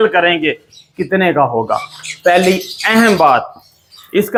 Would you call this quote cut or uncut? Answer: uncut